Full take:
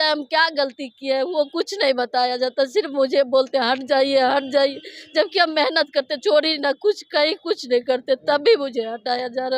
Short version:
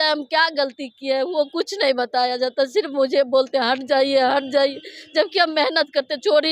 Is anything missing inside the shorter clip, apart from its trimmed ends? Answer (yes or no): no